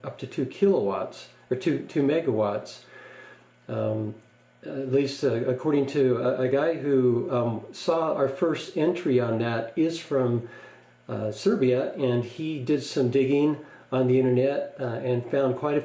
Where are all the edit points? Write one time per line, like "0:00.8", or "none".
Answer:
none